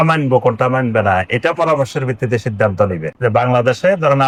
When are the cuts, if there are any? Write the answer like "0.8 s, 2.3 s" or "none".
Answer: none